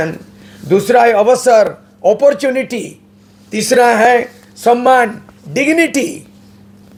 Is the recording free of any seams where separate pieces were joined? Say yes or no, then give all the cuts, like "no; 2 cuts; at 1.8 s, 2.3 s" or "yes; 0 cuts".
yes; 0 cuts